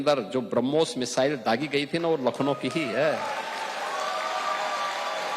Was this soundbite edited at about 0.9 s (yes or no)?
no